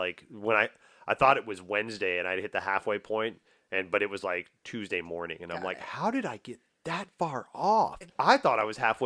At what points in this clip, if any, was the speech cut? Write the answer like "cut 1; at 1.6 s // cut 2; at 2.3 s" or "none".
cut 1; at 8.1 s